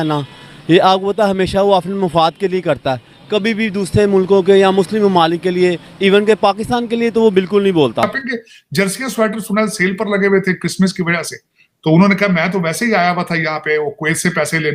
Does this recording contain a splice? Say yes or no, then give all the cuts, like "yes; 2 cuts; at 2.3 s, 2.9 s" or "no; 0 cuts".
yes; 1 cut; at 8.2 s